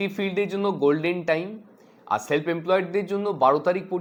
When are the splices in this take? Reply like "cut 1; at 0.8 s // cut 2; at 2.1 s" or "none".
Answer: none